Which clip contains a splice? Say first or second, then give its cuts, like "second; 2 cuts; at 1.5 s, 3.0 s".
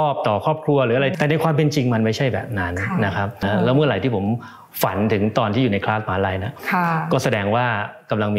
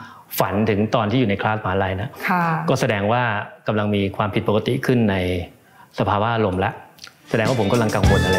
first; 2 cuts; at 1.1 s, 3.4 s